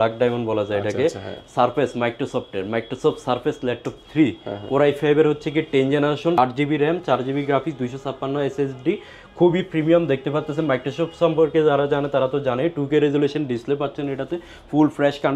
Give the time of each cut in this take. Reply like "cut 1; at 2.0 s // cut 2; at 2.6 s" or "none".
none